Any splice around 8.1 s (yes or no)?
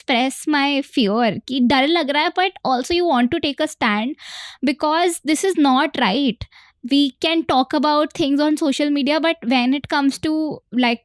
no